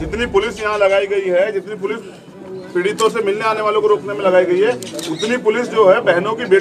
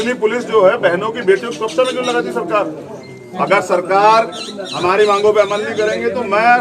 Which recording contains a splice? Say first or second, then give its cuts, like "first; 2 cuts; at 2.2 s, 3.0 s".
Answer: second; 1 cut; at 3.2 s